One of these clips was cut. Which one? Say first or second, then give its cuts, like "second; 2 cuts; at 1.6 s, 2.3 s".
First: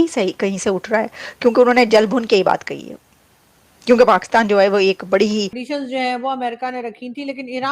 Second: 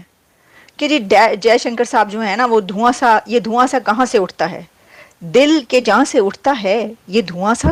first; 1 cut; at 5.6 s